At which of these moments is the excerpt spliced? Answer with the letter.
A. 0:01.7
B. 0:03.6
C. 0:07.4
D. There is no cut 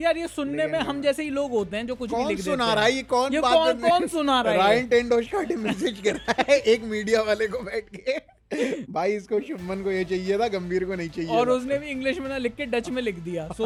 D